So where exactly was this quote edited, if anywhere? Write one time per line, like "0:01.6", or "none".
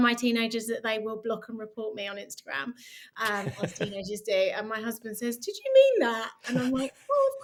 none